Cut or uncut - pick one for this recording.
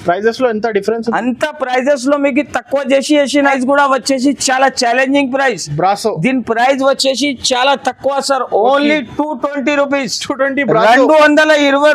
cut